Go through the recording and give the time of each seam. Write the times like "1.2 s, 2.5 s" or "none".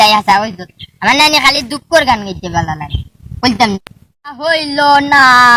4.4 s